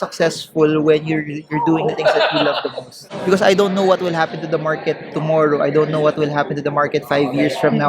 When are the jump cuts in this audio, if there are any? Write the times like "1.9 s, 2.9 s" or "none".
3.1 s